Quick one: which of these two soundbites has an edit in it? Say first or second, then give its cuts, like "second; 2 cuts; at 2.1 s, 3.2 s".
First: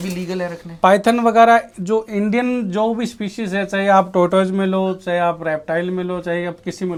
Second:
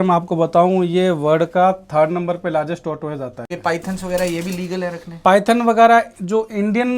second; 1 cut; at 3.5 s